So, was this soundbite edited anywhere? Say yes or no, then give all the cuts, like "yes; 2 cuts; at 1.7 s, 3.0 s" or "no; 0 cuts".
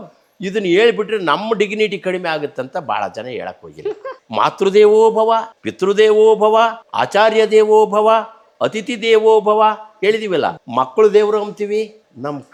no; 0 cuts